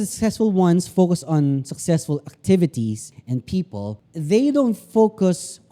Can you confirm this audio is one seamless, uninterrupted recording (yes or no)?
no